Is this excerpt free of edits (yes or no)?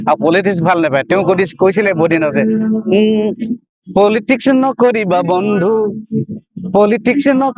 yes